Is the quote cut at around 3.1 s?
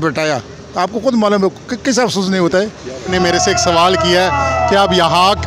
yes; 1 cut; at 3.1 s

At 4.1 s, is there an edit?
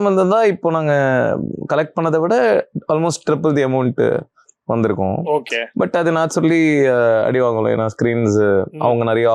no; 0 cuts

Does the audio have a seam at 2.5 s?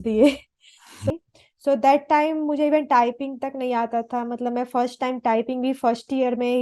no; 1 cut; at 1.1 s

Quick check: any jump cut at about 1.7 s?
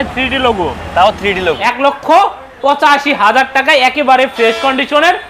yes; 1 cut; at 1.7 s

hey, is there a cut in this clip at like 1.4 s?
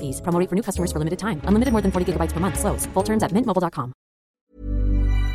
no; 1 cut; at 4.2 s

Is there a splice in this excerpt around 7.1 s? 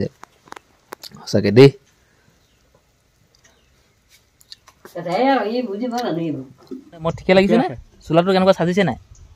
yes; 1 cut; at 7.1 s

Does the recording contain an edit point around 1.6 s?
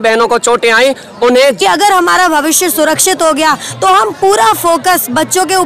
yes; 1 cut; at 1.6 s

